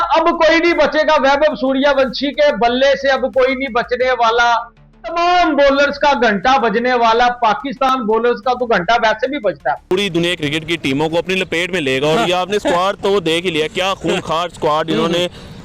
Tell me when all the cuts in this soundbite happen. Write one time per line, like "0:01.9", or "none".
0:09.8